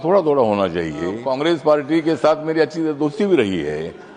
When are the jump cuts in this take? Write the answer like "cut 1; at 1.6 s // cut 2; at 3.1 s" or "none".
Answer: cut 1; at 1.3 s